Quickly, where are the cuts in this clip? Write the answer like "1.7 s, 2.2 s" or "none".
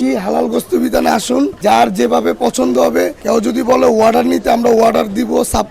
1.6 s